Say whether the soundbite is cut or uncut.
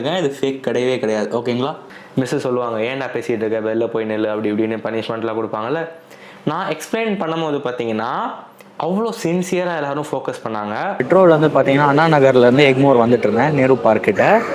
cut